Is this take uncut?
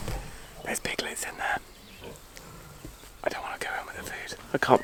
yes; 0 cuts

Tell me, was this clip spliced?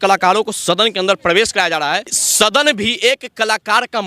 yes; 1 cut; at 2.2 s

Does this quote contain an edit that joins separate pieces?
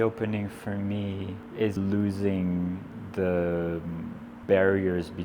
yes; 1 cut; at 1.8 s

